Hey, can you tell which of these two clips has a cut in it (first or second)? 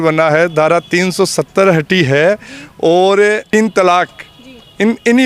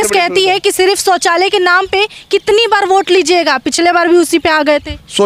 first